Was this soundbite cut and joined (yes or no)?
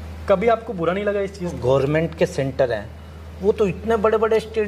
yes